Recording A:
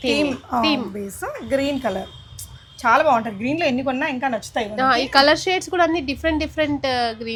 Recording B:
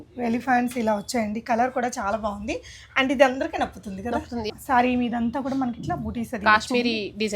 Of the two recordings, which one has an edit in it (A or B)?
B